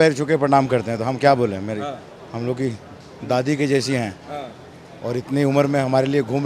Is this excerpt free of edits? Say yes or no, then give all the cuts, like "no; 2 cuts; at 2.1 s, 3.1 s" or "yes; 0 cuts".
yes; 0 cuts